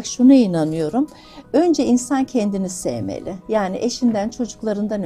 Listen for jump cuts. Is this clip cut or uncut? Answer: uncut